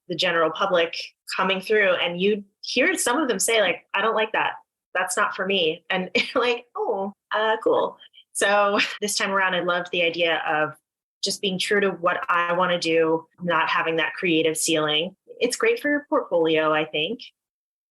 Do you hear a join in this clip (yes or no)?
yes